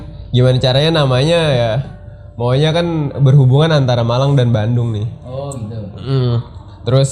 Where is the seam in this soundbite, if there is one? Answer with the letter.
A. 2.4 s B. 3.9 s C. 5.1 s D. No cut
D